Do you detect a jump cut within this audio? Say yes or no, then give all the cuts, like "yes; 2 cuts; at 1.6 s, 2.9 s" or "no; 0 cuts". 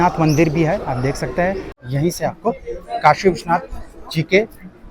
yes; 1 cut; at 1.7 s